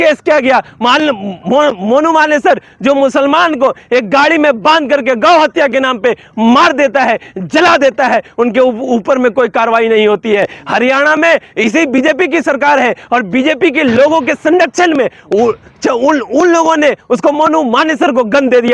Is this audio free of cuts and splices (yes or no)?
yes